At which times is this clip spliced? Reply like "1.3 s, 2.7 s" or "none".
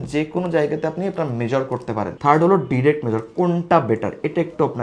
none